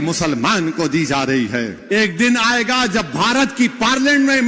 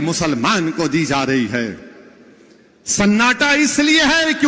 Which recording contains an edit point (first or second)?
first